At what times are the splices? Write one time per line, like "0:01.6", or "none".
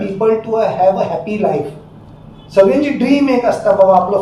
none